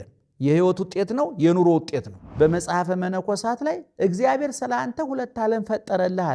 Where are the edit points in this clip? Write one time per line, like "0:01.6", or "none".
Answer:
0:02.2